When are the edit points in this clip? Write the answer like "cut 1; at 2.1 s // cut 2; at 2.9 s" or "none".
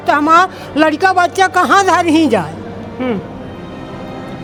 none